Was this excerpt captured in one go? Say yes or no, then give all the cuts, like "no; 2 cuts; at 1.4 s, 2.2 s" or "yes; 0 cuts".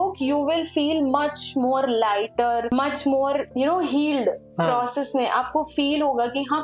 yes; 0 cuts